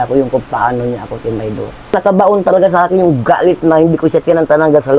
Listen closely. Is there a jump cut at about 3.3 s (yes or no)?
no